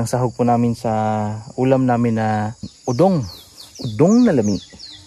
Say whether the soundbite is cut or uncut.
cut